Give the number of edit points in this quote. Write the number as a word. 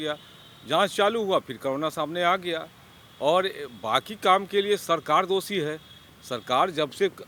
zero